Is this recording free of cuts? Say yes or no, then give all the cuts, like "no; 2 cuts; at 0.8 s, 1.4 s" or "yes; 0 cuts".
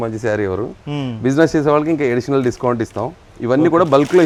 yes; 0 cuts